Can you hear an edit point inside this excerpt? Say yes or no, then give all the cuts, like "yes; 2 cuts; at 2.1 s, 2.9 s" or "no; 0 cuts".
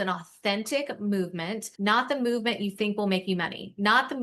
yes; 1 cut; at 1.6 s